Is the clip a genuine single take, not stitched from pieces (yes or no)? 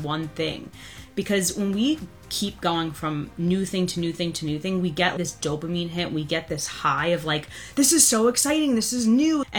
no